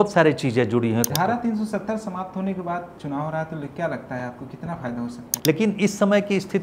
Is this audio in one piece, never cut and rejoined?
no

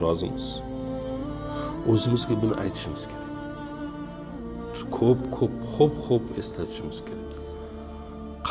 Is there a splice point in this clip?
no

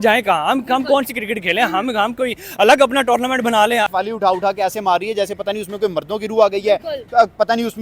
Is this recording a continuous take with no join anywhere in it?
no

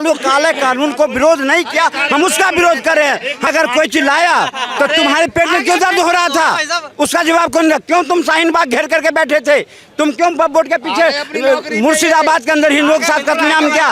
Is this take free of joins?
no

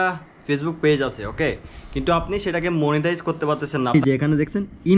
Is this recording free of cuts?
no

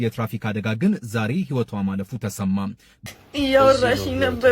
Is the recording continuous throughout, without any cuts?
no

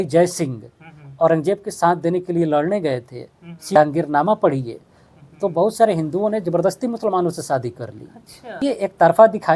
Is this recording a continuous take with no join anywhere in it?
no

